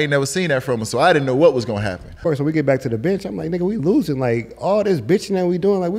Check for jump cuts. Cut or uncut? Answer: cut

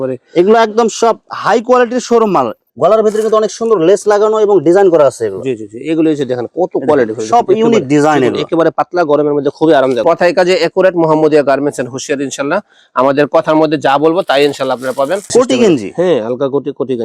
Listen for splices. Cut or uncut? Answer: cut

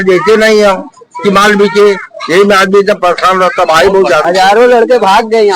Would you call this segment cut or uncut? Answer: cut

